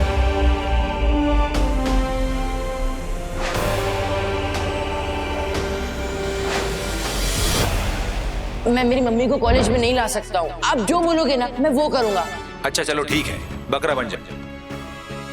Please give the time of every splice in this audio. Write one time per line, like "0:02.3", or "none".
none

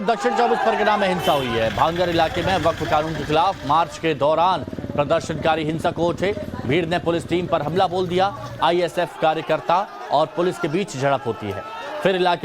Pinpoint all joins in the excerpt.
0:03.1

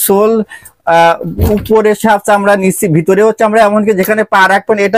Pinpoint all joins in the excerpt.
none

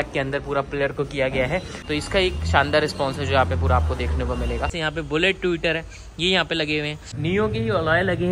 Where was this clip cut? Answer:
0:01.8
0:04.7
0:07.0

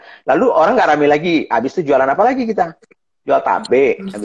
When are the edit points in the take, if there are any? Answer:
none

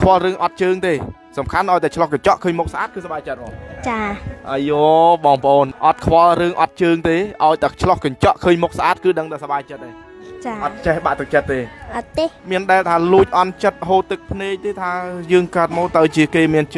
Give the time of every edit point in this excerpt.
0:05.7
0:12.4

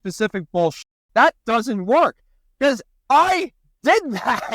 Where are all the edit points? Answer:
0:00.9

